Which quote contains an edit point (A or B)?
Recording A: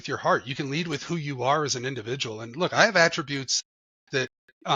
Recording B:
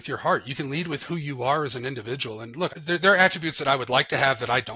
B